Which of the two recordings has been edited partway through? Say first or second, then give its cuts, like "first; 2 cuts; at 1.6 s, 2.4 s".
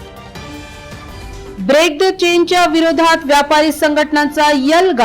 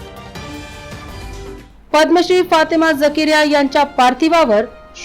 second; 1 cut; at 1.0 s